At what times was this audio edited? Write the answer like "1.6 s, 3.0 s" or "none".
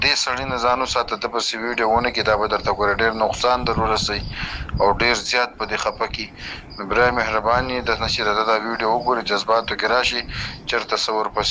none